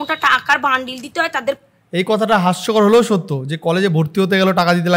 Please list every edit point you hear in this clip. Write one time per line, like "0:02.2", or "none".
none